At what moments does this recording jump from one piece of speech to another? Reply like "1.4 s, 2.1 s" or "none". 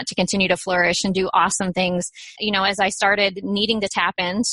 2.2 s